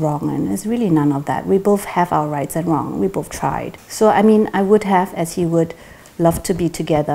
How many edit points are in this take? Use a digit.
1